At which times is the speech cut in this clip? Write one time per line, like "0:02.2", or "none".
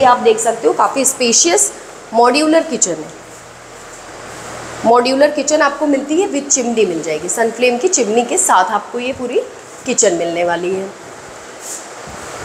none